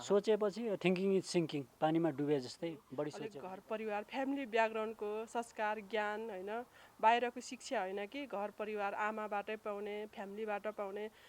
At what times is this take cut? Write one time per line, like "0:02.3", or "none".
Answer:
0:03.2